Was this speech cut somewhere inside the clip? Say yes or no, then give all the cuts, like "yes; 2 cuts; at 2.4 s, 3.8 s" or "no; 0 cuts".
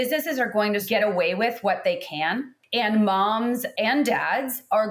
yes; 3 cuts; at 0.8 s, 2.6 s, 3.7 s